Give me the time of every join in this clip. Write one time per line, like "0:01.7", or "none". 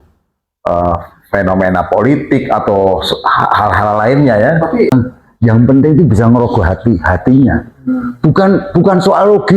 0:04.9

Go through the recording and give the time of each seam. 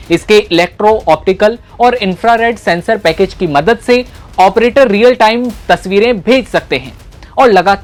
none

